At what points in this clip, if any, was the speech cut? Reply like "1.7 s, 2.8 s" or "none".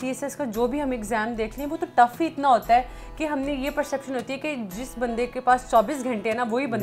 none